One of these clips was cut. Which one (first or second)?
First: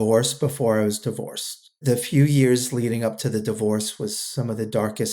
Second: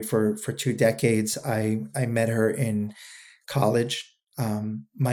first